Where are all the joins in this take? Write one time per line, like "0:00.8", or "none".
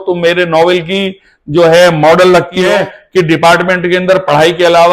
0:02.6